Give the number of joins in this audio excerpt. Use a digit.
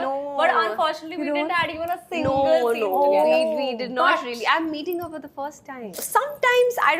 1